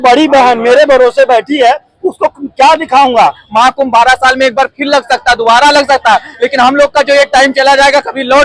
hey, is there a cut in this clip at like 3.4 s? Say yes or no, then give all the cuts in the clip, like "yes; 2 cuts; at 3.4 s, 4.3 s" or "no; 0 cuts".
yes; 1 cut; at 3.4 s